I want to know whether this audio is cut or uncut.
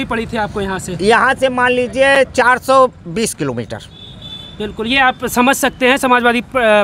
uncut